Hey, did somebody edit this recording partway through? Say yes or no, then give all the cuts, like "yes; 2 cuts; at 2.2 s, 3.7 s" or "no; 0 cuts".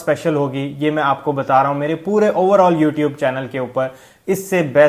no; 0 cuts